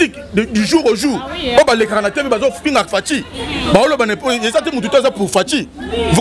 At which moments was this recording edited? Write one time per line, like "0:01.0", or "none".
none